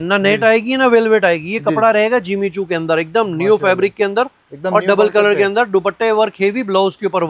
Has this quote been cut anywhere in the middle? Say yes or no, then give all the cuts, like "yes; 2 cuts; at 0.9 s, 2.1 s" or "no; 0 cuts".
no; 0 cuts